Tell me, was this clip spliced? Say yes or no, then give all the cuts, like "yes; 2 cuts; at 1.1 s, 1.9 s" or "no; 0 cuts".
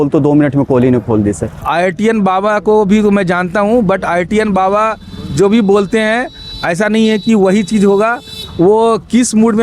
yes; 1 cut; at 1.6 s